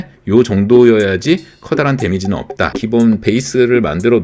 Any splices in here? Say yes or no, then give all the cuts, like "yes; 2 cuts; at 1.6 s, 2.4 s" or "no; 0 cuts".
yes; 1 cut; at 2.8 s